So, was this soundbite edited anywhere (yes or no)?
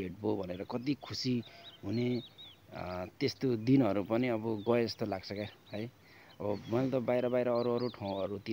no